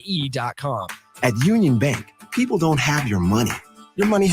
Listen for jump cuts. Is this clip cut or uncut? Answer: cut